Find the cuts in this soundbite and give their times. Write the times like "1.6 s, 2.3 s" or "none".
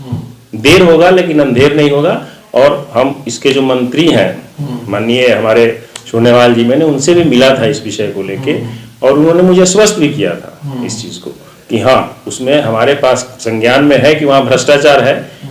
none